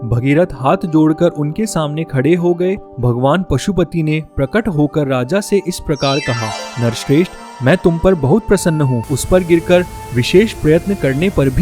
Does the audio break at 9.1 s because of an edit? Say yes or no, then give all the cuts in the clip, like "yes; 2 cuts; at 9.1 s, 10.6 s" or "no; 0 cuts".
yes; 2 cuts; at 2.9 s, 9.1 s